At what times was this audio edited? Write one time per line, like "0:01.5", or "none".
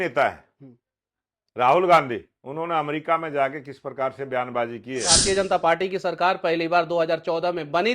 0:05.2